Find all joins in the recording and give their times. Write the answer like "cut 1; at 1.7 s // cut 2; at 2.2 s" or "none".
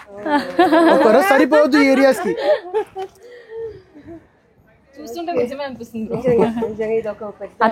none